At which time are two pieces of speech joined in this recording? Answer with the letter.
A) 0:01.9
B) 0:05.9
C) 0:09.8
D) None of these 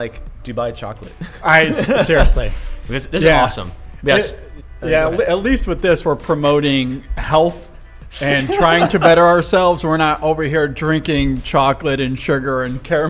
D